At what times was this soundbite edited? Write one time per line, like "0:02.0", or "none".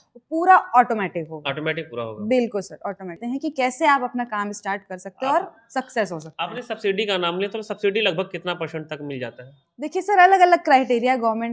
0:03.2